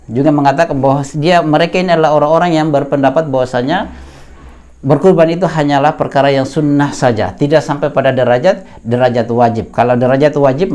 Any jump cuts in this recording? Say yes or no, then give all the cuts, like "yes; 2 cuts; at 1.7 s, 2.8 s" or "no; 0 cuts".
no; 0 cuts